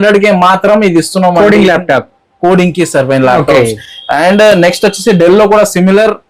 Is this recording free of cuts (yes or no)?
yes